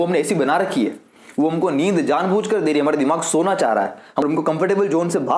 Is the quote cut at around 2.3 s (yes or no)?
no